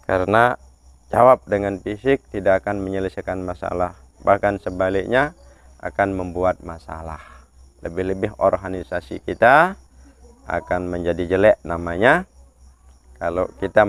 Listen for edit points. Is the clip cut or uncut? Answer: uncut